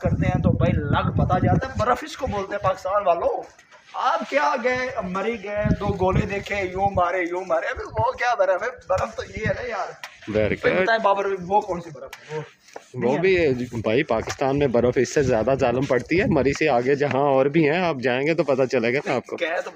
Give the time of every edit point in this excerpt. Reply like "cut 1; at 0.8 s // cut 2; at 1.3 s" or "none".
none